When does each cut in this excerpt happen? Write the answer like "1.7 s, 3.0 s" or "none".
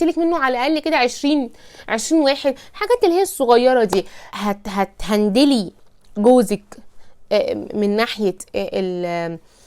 4.2 s